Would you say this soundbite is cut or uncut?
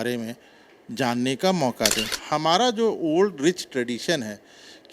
cut